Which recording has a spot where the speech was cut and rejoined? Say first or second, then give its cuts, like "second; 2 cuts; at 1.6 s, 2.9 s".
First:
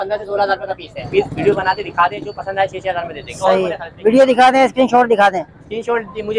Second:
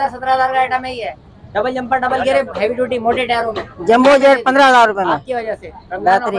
first; 1 cut; at 1.0 s